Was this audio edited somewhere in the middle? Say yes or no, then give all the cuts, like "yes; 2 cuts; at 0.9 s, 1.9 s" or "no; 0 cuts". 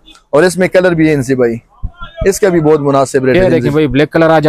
yes; 1 cut; at 3.4 s